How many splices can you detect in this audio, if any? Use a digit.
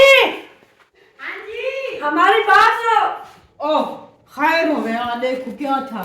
1